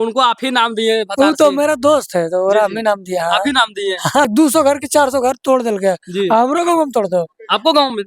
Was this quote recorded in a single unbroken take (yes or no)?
no